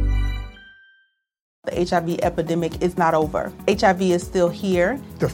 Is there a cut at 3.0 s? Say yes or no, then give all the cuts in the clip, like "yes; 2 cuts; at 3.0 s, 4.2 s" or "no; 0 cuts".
no; 1 cut; at 1.5 s